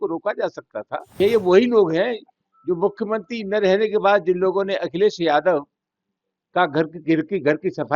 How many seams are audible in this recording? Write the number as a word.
one